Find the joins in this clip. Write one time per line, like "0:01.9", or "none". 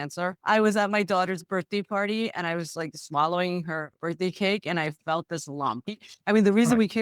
0:05.8